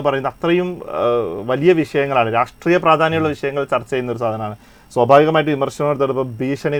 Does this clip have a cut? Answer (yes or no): no